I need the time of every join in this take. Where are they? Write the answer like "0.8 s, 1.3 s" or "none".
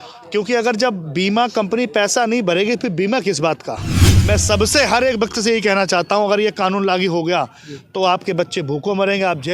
4.1 s